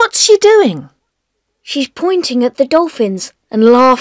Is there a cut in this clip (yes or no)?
no